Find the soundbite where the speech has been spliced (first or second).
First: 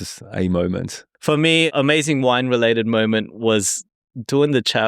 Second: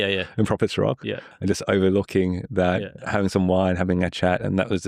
first